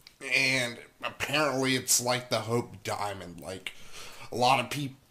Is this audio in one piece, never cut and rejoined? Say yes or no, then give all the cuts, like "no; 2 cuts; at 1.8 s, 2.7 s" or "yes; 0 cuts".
no; 1 cut; at 3.7 s